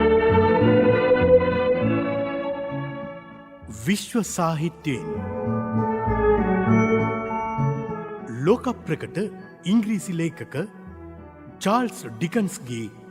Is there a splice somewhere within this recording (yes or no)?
yes